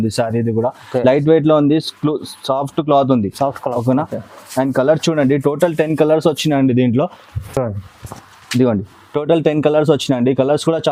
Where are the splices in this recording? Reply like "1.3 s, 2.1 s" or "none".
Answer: none